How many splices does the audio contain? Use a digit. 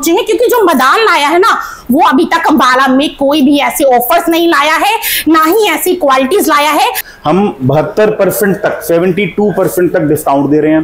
1